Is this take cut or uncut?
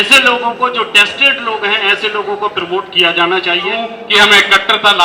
cut